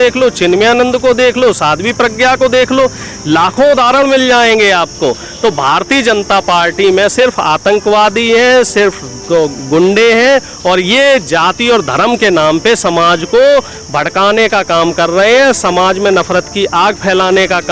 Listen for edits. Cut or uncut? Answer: uncut